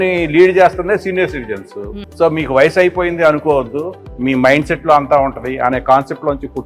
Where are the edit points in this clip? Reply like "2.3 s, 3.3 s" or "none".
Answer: none

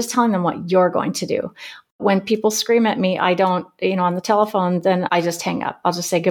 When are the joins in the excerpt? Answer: 5.2 s

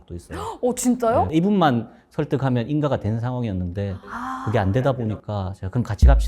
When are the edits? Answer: 1.3 s

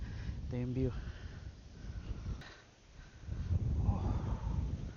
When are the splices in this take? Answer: 2.4 s

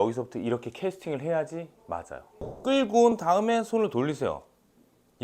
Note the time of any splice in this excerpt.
2.5 s

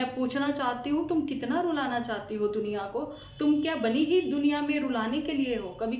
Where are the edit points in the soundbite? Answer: none

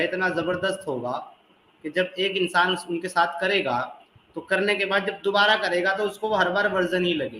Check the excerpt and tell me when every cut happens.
none

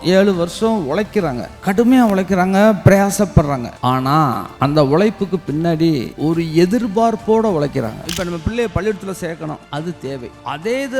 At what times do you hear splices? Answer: 1.5 s, 4.1 s, 6.1 s, 8.1 s, 10.0 s

